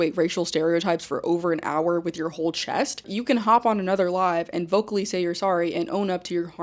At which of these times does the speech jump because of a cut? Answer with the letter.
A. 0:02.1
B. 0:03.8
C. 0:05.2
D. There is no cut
D